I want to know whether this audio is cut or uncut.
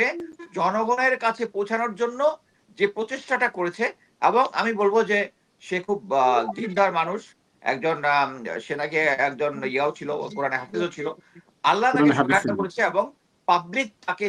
uncut